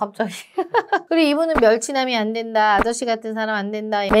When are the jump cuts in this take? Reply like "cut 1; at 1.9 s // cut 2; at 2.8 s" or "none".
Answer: cut 1; at 1.0 s